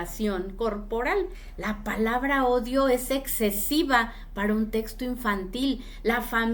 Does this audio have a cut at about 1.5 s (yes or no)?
yes